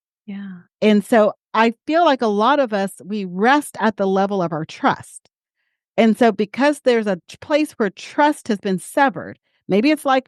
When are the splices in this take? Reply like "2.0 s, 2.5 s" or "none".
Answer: none